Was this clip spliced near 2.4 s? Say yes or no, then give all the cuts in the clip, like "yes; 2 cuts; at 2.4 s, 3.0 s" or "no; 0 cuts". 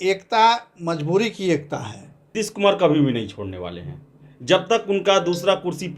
yes; 1 cut; at 2.4 s